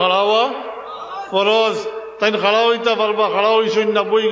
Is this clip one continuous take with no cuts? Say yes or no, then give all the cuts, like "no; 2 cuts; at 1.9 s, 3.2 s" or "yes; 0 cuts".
yes; 0 cuts